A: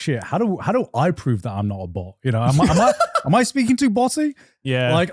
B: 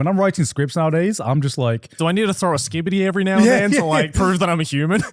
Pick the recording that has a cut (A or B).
B